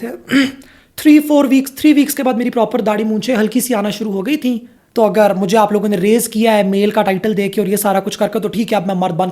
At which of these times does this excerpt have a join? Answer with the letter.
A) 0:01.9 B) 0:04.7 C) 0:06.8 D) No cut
B